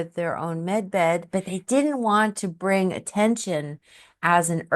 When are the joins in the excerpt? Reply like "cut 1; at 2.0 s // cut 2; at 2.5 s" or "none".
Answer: cut 1; at 1.4 s